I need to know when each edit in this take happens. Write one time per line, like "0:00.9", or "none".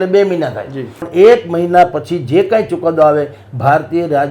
0:01.0